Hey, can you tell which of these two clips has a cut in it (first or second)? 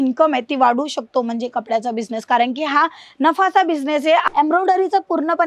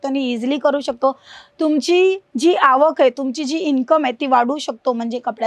first